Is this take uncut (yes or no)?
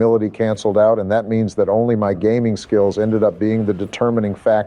yes